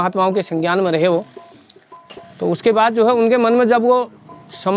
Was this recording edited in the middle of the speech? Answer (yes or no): no